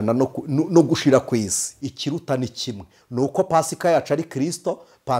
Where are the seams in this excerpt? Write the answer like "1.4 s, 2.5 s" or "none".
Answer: 1.6 s